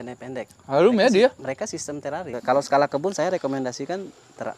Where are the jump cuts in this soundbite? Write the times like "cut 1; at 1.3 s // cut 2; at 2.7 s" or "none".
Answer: cut 1; at 2.3 s